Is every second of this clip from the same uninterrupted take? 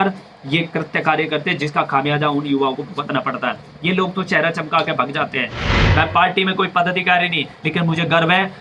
no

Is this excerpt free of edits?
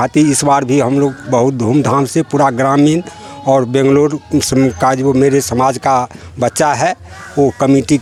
yes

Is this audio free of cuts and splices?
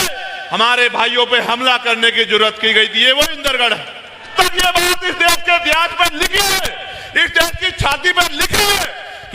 no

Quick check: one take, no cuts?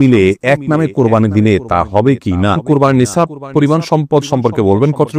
no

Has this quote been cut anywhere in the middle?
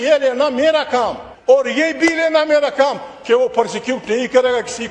yes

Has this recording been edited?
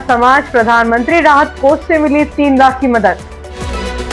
no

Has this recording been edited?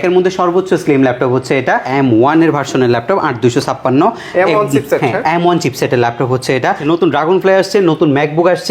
yes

